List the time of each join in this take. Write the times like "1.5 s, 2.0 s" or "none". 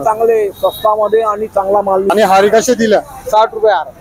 2.1 s